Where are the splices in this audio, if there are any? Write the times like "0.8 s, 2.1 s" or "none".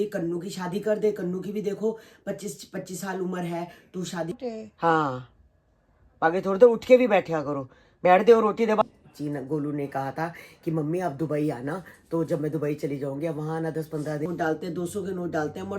4.4 s, 8.8 s, 14.3 s

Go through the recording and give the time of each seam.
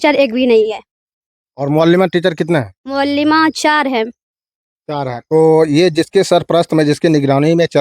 none

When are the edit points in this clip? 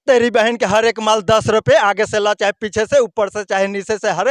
none

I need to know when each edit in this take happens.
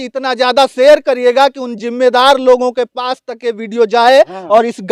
none

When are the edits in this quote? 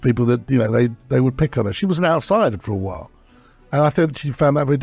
1.0 s

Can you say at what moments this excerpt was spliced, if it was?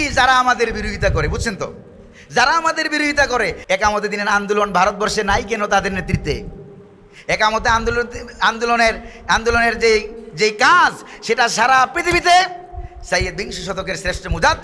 3.6 s

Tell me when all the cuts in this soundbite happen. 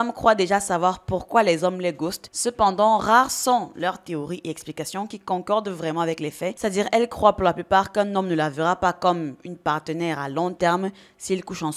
6.6 s

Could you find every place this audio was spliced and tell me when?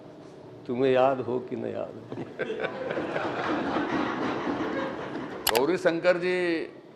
5.4 s

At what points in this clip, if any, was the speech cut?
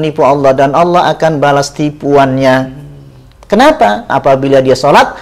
4.1 s

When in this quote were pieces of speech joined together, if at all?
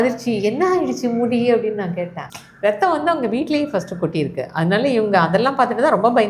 2.5 s

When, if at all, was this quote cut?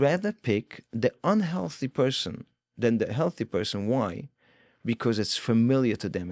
none

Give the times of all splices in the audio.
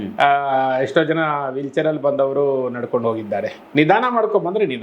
3.6 s

